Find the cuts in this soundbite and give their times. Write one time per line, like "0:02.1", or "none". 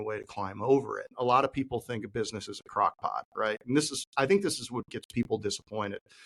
0:01.1